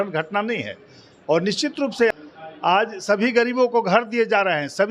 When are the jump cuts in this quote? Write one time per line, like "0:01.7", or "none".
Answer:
0:02.1